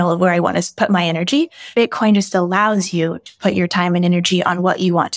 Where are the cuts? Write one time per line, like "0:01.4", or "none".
0:01.6